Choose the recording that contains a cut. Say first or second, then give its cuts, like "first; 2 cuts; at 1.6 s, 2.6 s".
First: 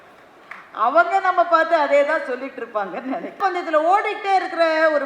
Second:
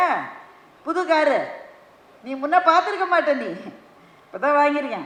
first; 1 cut; at 3.3 s